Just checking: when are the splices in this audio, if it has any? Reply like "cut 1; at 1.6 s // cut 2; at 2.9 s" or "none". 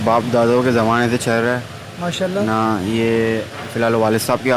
none